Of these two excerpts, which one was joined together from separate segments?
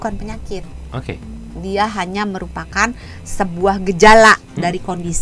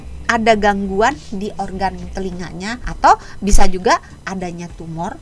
second; 1 cut; at 2.9 s

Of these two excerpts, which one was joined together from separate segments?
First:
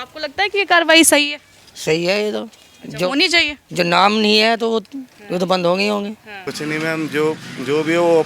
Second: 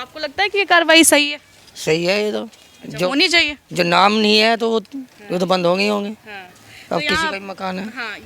first; 1 cut; at 6.5 s

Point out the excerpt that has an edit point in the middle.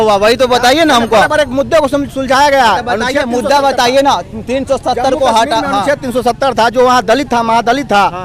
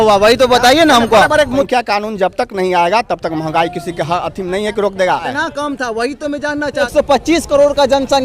second; 3 cuts; at 1.7 s, 5.4 s, 6.9 s

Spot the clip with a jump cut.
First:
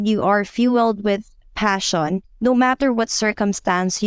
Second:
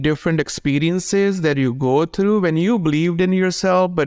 first; 1 cut; at 2.3 s

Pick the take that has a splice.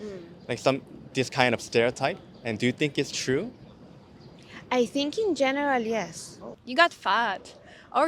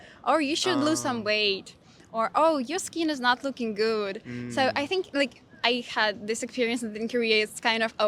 first; 2 cuts; at 4.3 s, 6.6 s

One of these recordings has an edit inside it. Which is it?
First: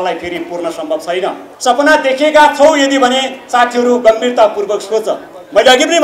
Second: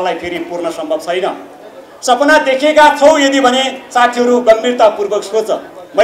first; 1 cut; at 1.5 s

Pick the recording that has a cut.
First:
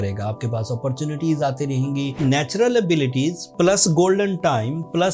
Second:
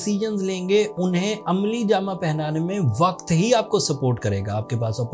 first; 1 cut; at 2.2 s

